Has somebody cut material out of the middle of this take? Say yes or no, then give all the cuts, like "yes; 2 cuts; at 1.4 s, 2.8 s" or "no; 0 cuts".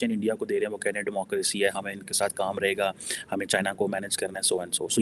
no; 0 cuts